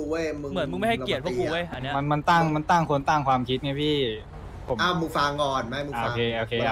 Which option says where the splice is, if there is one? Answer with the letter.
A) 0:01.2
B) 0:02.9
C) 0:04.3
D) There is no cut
D